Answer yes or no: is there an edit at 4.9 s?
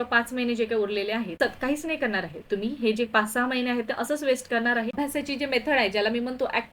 yes